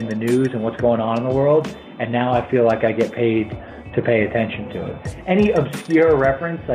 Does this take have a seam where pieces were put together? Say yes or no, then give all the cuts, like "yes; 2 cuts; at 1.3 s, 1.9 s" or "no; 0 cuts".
yes; 1 cut; at 5.0 s